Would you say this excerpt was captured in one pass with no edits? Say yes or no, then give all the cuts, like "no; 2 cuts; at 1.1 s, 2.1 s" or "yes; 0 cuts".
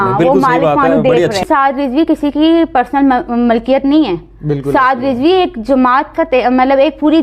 no; 1 cut; at 1.4 s